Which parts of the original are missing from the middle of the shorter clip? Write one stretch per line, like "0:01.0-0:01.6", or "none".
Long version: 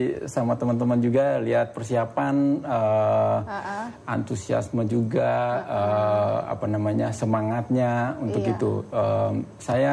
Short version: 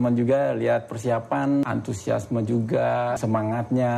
0:02.5-0:04.1
0:05.6-0:07.2